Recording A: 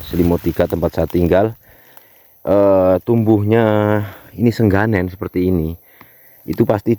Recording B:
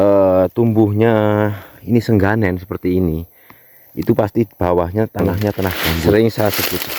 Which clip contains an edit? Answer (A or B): B